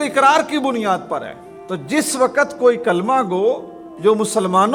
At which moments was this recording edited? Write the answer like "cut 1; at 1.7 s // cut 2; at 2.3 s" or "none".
none